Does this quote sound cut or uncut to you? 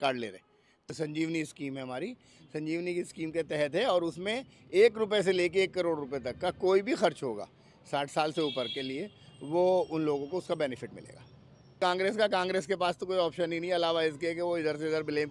cut